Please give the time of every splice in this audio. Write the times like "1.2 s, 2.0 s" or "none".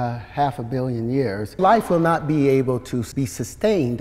1.6 s, 3.1 s